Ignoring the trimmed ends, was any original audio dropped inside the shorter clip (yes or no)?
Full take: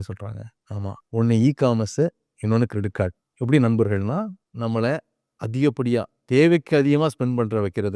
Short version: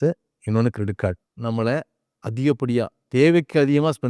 yes